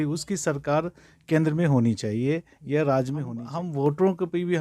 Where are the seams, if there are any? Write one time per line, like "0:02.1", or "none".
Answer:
0:03.4